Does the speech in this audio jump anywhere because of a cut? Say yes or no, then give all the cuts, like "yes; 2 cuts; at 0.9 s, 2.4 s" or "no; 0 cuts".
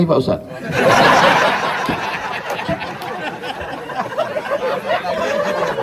no; 0 cuts